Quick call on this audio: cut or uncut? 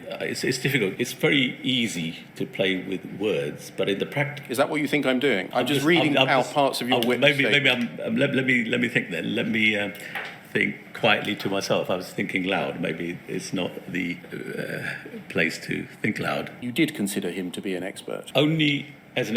cut